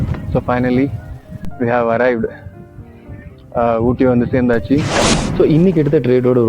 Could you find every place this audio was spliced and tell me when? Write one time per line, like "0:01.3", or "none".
0:04.9